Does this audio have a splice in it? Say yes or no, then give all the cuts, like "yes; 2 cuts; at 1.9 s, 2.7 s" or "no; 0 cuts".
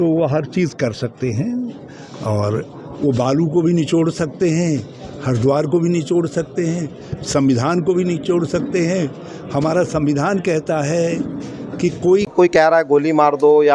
yes; 1 cut; at 12.8 s